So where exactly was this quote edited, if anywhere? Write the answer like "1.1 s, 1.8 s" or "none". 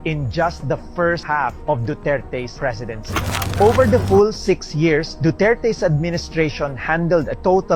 3.5 s